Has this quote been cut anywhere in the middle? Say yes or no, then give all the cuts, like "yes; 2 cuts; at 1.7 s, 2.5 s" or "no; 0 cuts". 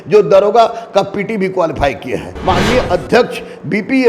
yes; 1 cut; at 2.3 s